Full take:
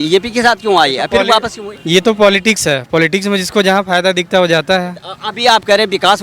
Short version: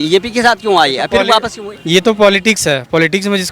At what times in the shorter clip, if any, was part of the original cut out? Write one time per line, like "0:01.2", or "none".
none